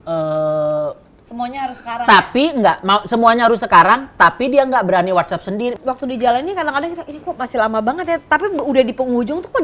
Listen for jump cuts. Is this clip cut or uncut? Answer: cut